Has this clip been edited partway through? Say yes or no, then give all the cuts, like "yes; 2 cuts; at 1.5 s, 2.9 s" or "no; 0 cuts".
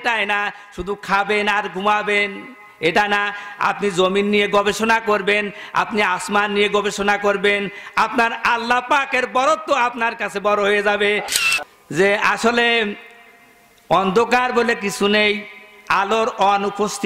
yes; 1 cut; at 11.3 s